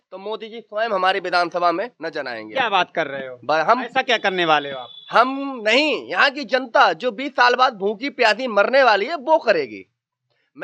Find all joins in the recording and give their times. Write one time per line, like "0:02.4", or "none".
none